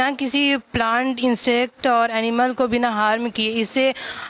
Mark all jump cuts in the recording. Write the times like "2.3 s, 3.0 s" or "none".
none